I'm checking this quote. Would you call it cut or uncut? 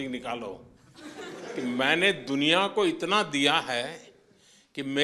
uncut